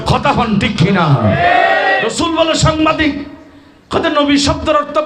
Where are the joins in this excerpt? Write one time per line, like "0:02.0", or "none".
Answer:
0:02.1